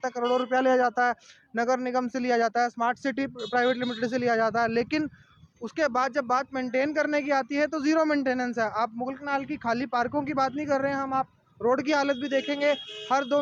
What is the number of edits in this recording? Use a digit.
0